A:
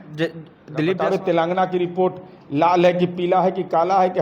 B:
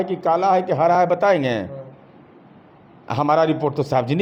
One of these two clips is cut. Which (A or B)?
A